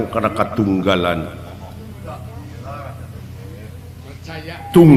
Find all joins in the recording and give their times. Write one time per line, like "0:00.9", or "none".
none